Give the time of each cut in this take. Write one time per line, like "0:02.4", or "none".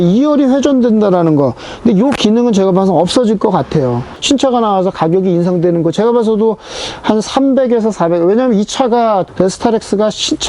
0:04.1
0:09.3

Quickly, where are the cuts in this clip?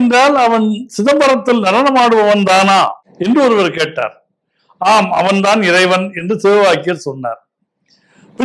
0:03.1

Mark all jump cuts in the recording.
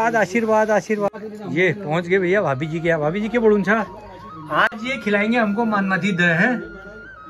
0:01.1

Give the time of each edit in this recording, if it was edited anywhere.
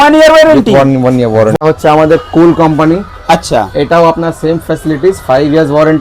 0:01.6

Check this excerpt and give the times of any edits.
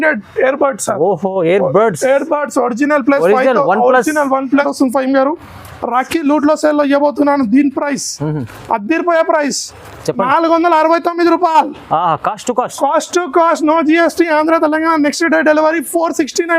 0:04.7

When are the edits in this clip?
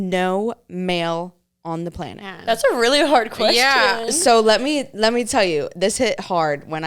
0:02.3

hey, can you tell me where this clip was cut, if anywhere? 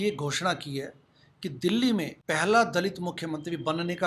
0:02.2

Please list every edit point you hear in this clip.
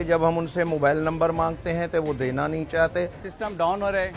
0:03.2

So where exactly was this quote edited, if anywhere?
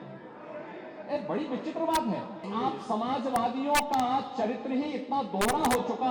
0:02.4

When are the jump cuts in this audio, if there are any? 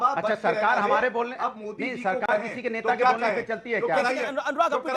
none

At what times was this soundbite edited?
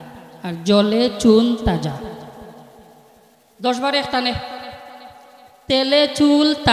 none

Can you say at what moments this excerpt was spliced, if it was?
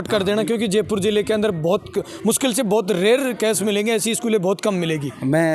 none

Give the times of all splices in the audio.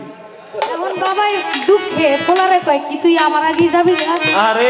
0:00.9

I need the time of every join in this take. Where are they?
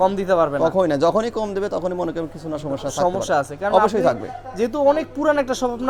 none

